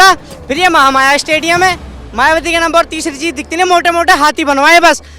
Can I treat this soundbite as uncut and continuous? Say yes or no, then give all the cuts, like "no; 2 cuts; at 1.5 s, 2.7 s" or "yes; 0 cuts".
yes; 0 cuts